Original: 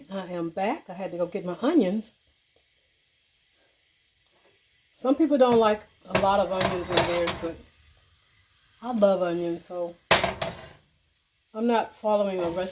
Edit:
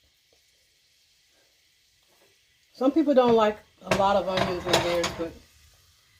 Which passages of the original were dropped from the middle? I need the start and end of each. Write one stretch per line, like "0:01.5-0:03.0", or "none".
none